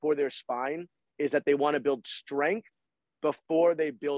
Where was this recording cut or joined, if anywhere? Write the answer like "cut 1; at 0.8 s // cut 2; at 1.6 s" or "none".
none